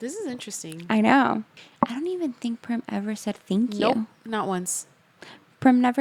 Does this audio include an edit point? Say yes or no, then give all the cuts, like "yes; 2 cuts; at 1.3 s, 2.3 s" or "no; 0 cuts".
yes; 1 cut; at 1.6 s